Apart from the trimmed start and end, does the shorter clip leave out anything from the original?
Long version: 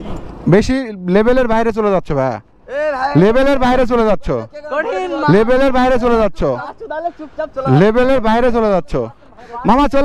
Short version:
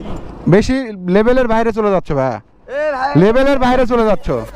no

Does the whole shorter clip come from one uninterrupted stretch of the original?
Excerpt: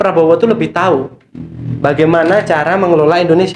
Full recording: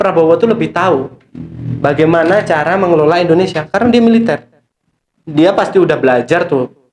yes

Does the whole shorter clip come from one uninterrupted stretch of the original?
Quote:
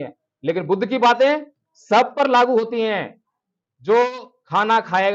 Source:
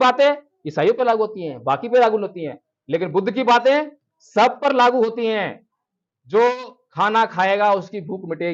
yes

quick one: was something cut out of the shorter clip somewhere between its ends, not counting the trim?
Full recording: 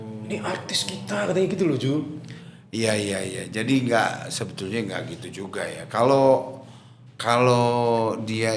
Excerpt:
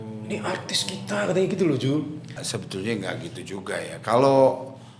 yes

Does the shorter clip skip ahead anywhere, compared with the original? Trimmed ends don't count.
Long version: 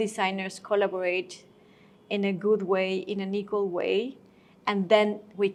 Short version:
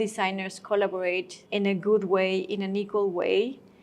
yes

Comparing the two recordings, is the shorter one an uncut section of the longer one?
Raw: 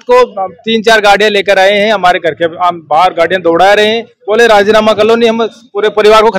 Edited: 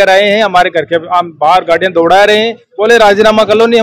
yes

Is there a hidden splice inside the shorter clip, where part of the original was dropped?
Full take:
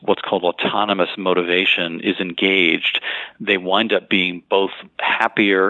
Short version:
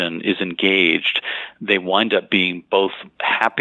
no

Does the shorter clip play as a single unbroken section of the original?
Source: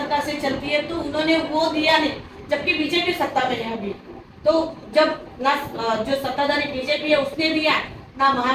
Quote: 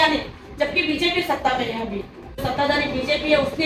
no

